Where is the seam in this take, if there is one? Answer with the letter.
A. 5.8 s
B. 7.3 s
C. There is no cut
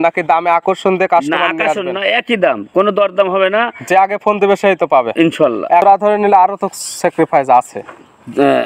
A